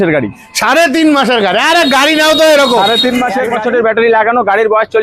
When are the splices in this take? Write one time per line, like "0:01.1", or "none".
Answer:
0:03.5